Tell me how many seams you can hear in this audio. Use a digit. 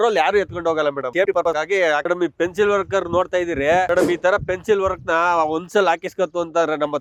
0